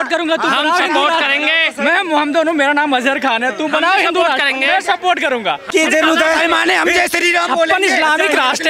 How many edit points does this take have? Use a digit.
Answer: 1